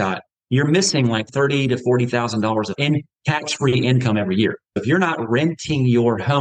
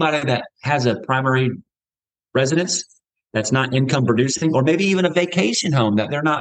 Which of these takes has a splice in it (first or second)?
first